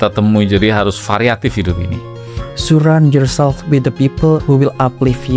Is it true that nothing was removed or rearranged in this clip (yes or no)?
no